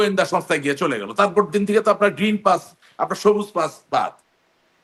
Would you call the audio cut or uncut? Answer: uncut